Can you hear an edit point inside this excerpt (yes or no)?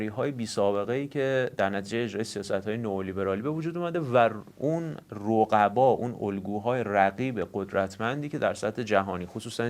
no